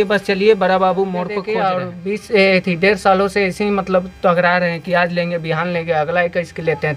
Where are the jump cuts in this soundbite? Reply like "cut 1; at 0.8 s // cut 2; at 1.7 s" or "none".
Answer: cut 1; at 1.4 s